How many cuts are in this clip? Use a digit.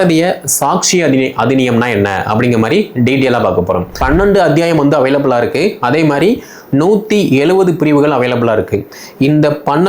1